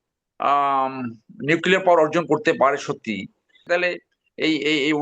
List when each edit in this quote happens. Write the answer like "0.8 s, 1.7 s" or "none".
3.6 s